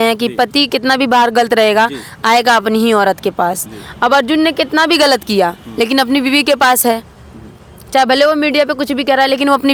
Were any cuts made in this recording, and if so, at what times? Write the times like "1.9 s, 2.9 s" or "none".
none